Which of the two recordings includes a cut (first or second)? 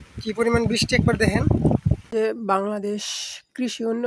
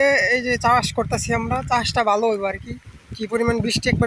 first